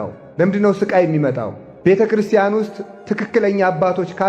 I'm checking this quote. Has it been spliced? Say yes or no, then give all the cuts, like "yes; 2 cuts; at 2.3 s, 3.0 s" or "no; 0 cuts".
no; 0 cuts